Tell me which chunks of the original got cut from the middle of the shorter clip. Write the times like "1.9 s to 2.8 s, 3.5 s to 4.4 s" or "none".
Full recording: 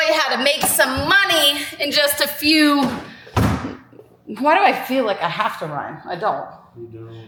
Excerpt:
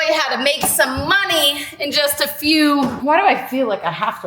3.0 s to 4.3 s

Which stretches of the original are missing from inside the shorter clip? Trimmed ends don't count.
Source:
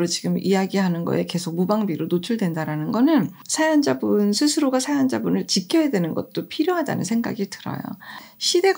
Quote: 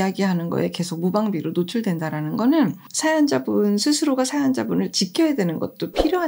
none

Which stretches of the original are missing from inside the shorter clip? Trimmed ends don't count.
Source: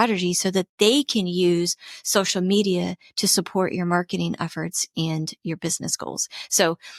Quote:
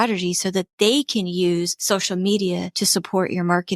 1.8 s to 2.0 s, 3.0 s to 3.2 s

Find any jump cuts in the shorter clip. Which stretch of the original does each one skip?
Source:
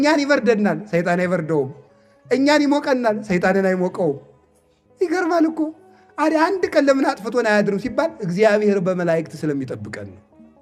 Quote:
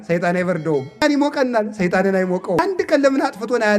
1.9 s to 2.5 s, 4.1 s to 6.4 s

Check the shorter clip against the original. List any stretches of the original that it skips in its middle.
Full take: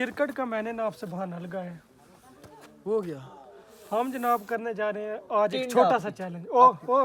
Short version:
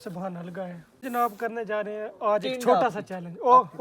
2.0 s to 4.1 s

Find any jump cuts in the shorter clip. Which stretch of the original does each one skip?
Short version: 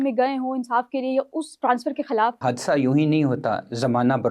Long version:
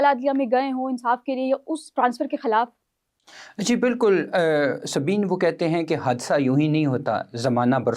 2.7 s to 6.0 s

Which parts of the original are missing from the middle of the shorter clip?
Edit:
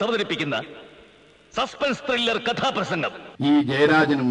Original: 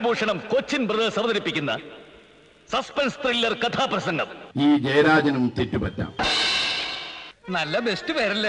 none

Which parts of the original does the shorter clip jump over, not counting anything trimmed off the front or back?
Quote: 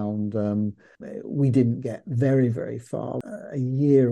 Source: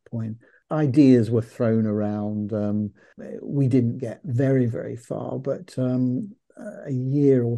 5.3 s to 6.5 s

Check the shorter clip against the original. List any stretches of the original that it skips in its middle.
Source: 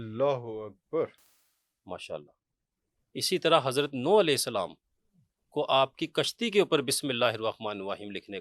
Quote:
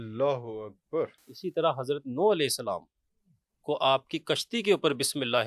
1.3 s to 3.1 s

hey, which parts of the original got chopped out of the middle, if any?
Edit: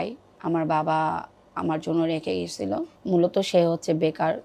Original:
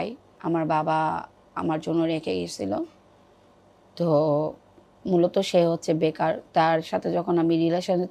2.9 s to 4.9 s

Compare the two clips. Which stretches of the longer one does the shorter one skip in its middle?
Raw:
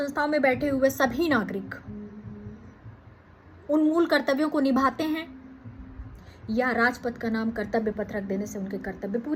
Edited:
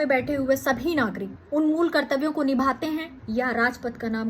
1.7 s to 3.5 s, 5.3 s to 6.4 s

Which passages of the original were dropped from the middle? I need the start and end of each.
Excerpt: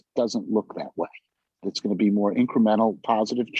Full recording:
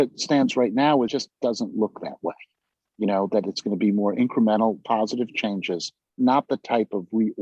2.9 s to 3.5 s

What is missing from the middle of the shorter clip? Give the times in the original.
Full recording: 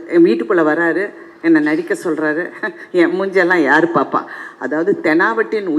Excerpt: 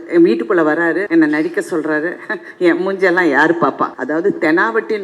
1.0 s to 1.4 s, 4.3 s to 4.5 s

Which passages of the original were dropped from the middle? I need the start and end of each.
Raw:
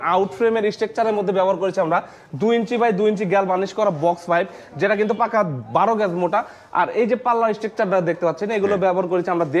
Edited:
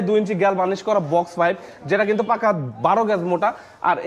none

